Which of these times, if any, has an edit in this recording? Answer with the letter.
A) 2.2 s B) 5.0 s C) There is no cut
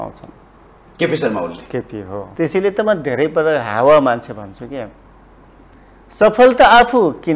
A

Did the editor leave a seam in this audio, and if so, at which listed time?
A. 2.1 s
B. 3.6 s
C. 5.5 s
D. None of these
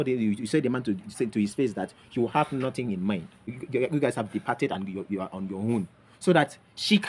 B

